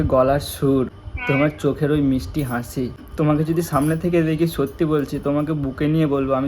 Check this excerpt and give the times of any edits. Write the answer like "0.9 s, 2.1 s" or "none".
1.1 s, 3.0 s